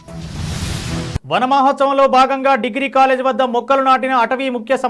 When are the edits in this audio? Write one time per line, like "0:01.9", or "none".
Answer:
0:01.2